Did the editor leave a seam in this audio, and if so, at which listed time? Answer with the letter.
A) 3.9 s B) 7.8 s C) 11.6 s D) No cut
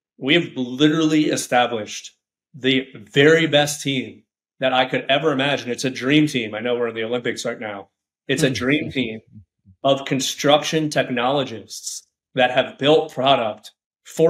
D